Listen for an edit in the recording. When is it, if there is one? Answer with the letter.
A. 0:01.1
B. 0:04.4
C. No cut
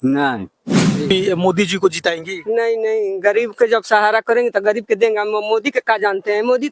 A